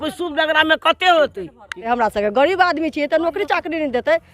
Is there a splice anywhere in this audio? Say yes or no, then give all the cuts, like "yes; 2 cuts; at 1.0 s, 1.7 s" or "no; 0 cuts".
yes; 1 cut; at 1.8 s